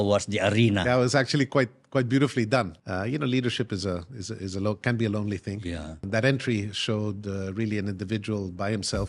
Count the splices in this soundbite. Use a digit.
2